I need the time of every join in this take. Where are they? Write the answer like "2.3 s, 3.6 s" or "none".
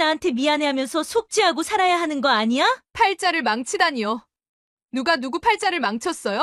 2.9 s